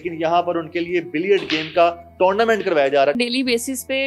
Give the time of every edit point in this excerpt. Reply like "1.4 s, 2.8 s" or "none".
3.2 s